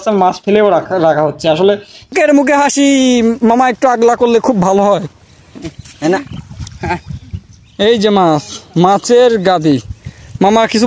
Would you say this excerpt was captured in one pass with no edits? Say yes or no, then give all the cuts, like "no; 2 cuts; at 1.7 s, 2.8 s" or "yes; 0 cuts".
no; 1 cut; at 2.1 s